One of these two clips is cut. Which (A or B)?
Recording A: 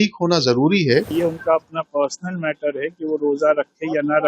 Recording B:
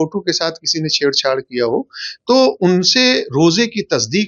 A